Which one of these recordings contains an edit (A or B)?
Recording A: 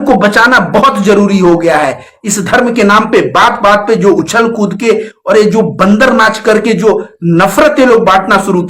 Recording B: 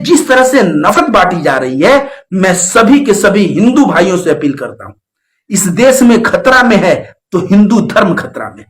B